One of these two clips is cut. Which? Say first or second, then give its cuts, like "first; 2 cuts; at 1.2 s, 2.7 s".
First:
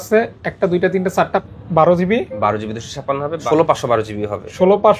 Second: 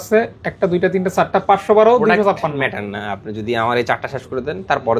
first; 2 cuts; at 1.4 s, 3.4 s